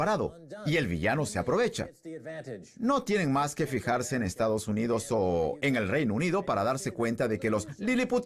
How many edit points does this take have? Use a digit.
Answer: 0